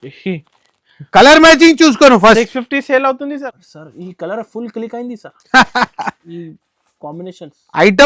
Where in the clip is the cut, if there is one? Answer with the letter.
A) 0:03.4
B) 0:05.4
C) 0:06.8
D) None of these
A